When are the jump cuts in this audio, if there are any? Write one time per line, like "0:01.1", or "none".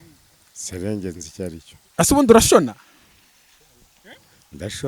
0:01.8